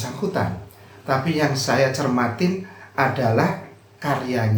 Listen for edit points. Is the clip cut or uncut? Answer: uncut